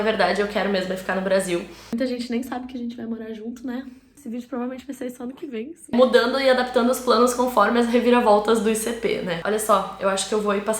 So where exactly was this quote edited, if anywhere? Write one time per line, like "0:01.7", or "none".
0:01.9
0:04.2
0:05.9
0:09.4